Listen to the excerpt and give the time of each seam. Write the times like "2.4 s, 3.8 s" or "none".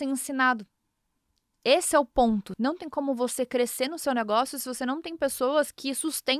2.5 s